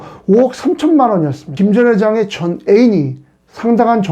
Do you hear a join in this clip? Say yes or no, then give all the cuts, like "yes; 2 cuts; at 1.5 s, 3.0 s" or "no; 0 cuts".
yes; 1 cut; at 1.5 s